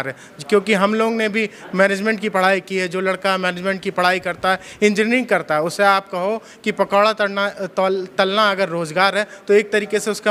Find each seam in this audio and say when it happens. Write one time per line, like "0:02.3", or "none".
none